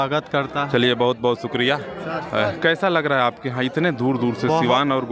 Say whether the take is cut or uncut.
uncut